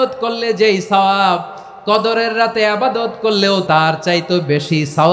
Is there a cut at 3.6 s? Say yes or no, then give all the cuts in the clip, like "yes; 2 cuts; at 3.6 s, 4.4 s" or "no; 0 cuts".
yes; 1 cut; at 3.6 s